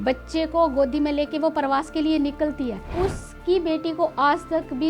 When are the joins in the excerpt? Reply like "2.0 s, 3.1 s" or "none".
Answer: 2.9 s